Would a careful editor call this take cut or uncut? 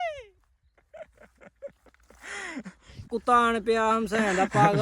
cut